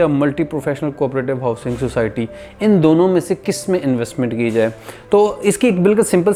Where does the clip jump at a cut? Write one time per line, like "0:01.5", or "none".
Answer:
none